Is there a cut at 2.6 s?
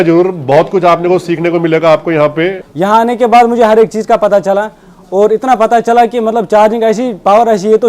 yes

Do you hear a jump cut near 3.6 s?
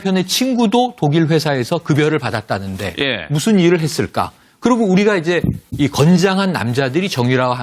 yes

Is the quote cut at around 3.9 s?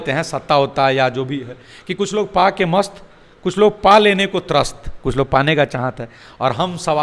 no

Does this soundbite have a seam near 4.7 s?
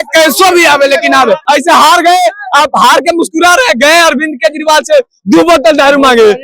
no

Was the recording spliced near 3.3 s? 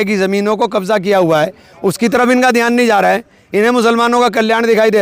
yes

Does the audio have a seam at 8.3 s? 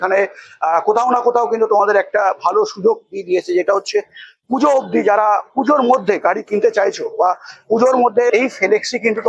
yes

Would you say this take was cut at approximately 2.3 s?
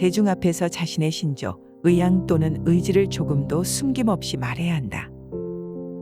no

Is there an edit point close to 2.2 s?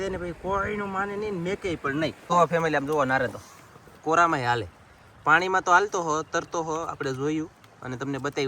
yes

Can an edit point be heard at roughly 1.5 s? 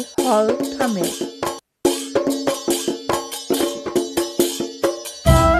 yes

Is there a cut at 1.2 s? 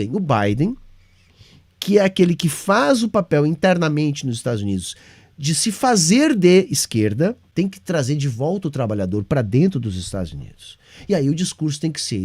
no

